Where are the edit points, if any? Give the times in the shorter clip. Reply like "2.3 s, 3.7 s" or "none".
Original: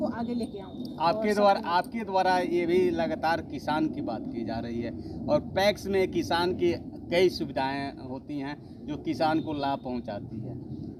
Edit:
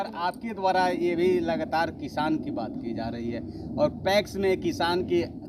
none